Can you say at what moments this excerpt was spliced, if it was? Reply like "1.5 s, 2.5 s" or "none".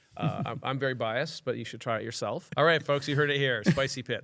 2.5 s